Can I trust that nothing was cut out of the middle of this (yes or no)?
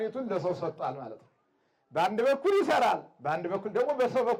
yes